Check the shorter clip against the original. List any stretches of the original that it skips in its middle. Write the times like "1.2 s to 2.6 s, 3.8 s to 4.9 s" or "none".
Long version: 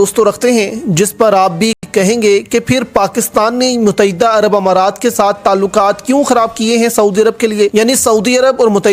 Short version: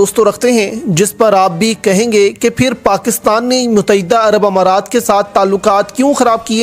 1.8 s to 1.9 s